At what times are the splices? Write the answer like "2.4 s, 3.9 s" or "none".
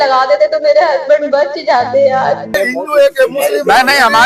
2.6 s